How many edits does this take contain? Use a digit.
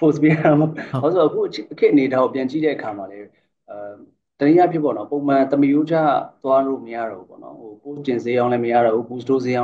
0